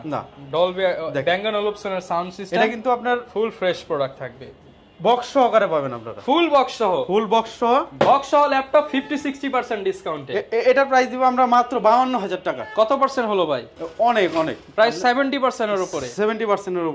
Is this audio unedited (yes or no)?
yes